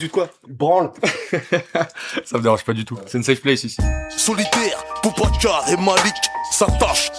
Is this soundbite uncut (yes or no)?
no